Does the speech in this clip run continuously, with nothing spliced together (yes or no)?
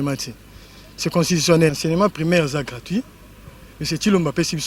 no